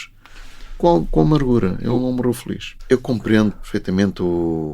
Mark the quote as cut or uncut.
cut